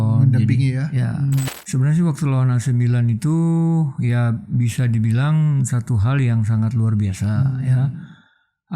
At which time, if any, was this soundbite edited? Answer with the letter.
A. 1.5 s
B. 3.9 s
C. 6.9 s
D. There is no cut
A